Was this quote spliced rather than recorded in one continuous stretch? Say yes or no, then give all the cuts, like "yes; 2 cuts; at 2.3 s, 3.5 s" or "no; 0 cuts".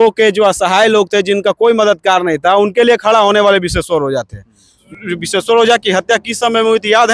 yes; 1 cut; at 4.9 s